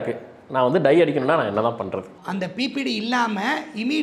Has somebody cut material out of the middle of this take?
yes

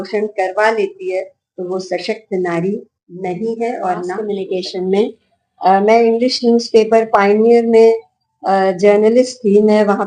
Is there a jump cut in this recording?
yes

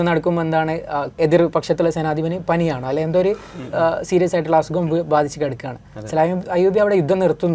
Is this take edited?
yes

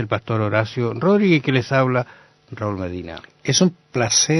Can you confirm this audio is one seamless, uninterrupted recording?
no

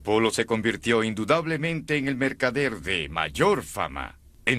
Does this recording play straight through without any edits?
yes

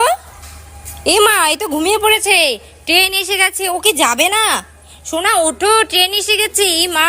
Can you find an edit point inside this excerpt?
no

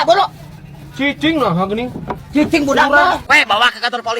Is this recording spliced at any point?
yes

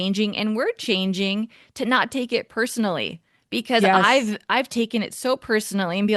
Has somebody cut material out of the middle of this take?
no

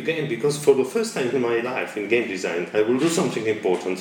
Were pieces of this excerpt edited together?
no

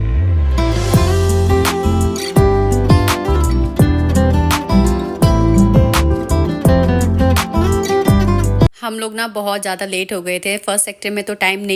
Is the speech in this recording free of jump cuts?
yes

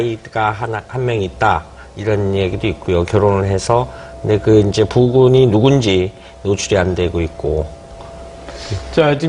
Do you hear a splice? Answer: yes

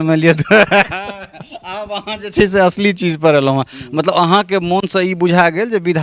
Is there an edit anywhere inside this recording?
no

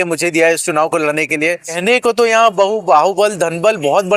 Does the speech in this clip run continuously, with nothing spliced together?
no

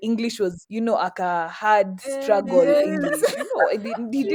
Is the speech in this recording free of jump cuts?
yes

